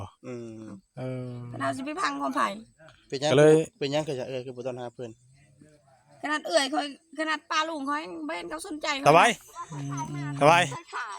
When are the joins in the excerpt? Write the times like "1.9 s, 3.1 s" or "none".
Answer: 8.9 s